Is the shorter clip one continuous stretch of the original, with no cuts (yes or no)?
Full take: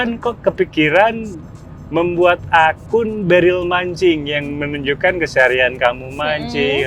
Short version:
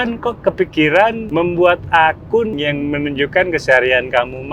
no